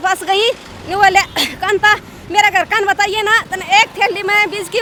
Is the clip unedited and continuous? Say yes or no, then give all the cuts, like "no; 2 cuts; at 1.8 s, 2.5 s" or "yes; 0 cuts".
yes; 0 cuts